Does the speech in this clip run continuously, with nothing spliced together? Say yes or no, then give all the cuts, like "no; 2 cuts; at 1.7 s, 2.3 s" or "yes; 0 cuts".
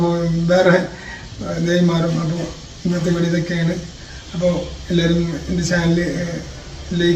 yes; 0 cuts